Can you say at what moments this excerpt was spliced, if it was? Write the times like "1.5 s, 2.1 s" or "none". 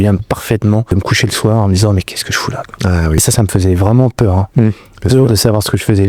0.9 s, 3.2 s